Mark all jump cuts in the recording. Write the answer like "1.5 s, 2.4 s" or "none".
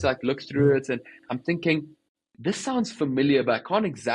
2.1 s

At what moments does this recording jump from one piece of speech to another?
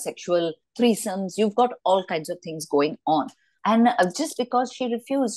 none

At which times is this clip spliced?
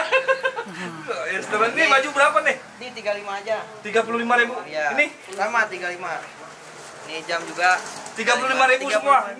none

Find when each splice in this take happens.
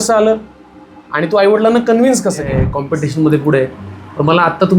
2.7 s

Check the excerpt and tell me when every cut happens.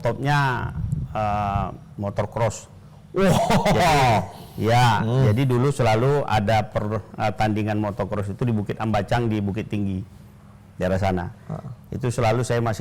none

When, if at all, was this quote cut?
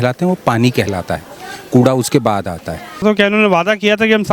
3.0 s

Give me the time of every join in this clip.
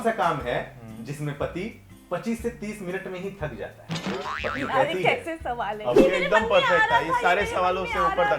4.2 s, 6.0 s

